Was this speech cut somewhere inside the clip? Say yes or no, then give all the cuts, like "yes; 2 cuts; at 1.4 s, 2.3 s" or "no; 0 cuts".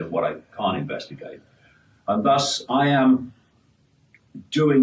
yes; 1 cut; at 1.1 s